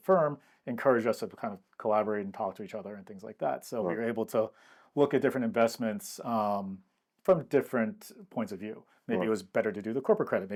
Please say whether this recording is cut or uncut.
uncut